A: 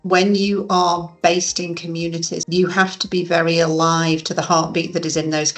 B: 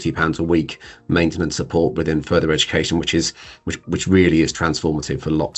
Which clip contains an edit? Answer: A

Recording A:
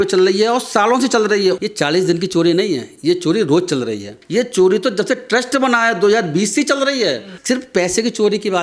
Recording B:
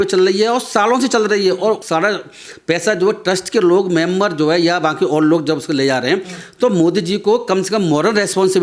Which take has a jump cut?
A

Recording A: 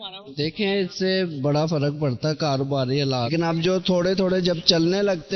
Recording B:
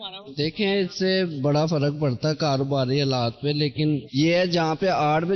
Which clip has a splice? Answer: A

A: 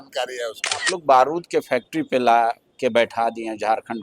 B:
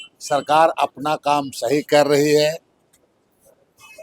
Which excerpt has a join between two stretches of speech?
A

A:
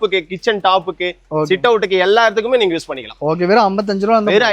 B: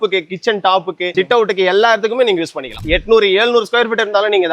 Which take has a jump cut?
B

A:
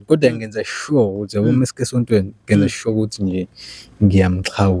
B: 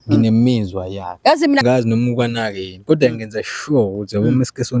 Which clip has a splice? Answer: B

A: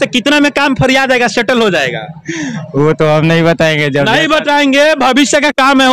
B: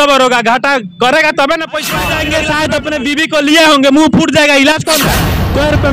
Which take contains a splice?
B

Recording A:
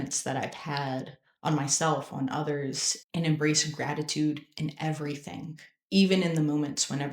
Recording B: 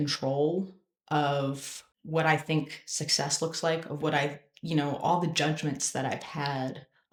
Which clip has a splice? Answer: A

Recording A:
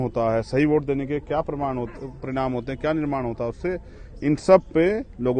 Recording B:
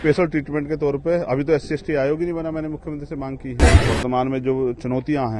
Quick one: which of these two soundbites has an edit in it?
B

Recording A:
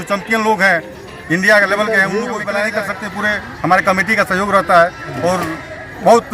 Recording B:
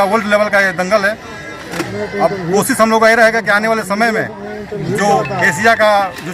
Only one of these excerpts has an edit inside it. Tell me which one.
A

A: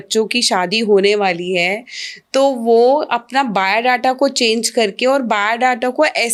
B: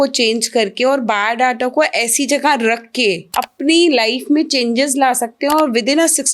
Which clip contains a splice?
B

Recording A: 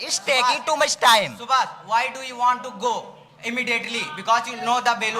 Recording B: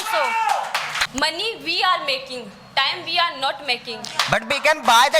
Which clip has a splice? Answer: B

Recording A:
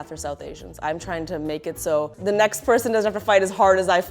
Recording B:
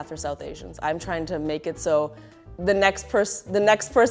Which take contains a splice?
A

